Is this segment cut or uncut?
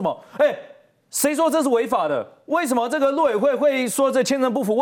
uncut